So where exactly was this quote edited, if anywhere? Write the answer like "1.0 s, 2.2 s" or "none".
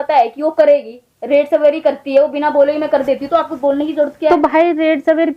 none